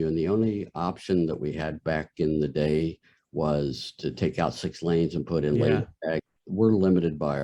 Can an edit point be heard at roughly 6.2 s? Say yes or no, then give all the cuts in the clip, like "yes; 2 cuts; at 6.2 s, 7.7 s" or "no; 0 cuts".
yes; 1 cut; at 6.2 s